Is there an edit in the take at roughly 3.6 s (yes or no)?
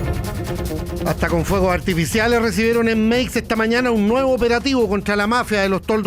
no